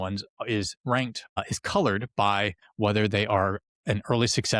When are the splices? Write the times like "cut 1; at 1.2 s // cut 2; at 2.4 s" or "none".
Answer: cut 1; at 1.2 s // cut 2; at 2.6 s